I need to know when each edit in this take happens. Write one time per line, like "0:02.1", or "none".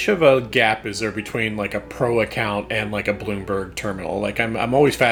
none